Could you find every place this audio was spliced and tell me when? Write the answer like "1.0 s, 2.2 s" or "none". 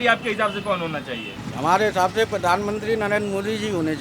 1.4 s